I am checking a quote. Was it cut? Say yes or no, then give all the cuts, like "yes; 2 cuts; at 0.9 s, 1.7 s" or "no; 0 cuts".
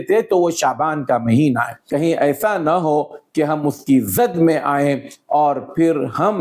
yes; 1 cut; at 1.8 s